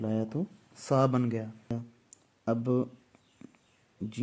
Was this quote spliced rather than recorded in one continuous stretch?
yes; 1 cut; at 1.7 s

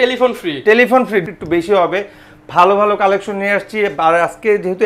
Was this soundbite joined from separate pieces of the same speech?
yes; 1 cut; at 1.2 s

